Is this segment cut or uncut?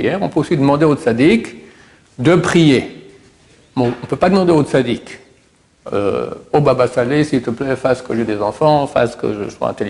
uncut